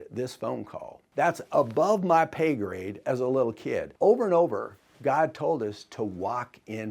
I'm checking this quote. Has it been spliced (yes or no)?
yes